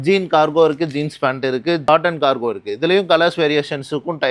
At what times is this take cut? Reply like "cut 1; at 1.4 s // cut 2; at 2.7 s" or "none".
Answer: none